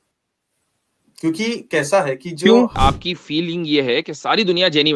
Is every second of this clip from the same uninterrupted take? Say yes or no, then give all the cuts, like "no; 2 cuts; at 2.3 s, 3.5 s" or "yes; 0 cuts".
no; 1 cut; at 2.7 s